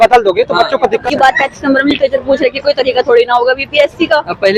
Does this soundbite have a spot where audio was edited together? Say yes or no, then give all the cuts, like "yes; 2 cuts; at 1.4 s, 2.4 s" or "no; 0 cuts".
yes; 1 cut; at 0.9 s